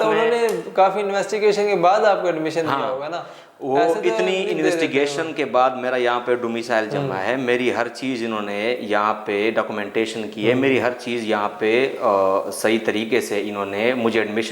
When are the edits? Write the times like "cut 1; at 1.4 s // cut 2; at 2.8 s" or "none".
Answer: none